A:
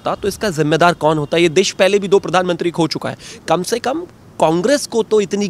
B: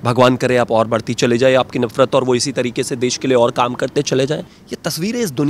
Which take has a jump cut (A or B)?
B